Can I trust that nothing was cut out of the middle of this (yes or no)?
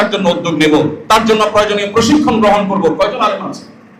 yes